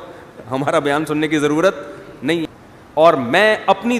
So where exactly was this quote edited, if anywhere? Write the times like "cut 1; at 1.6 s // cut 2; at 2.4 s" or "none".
cut 1; at 2.5 s